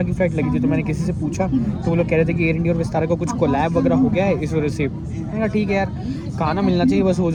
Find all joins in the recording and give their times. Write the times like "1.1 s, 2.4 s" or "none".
none

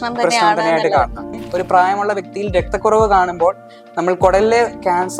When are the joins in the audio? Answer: 1.4 s

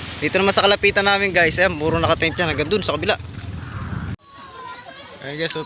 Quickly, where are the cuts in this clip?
4.1 s

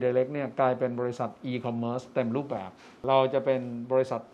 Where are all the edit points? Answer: 2.8 s

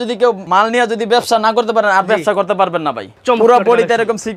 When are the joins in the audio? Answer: 3.1 s

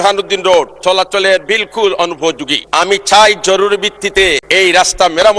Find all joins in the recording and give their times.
2.5 s, 4.4 s

